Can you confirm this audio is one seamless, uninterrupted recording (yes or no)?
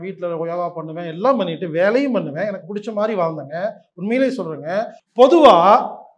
no